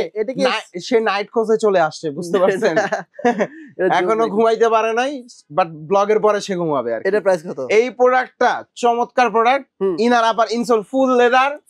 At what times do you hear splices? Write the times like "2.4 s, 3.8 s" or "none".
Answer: none